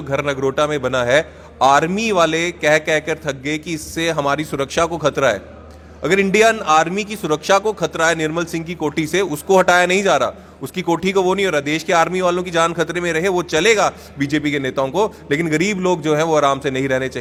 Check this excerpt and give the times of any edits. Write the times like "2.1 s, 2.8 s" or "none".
none